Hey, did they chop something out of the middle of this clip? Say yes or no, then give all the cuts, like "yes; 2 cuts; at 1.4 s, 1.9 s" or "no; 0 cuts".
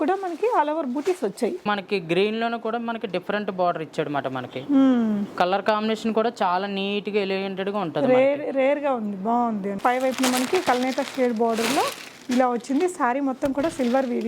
yes; 2 cuts; at 1.6 s, 9.7 s